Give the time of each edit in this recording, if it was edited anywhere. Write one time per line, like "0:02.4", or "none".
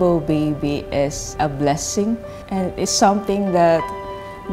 0:01.3
0:02.4